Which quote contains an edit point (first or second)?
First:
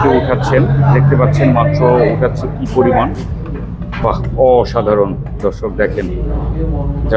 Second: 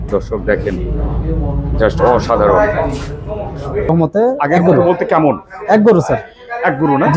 second